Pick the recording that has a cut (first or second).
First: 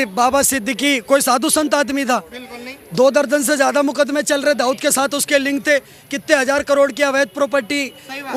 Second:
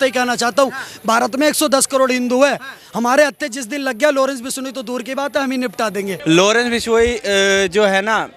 second